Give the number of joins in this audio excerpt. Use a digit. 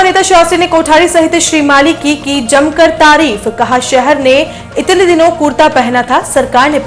0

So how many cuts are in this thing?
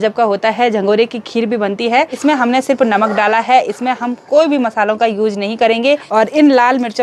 2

